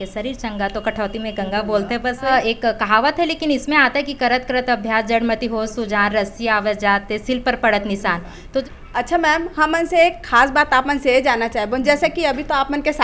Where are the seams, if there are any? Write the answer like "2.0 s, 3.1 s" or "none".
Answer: 2.3 s, 8.6 s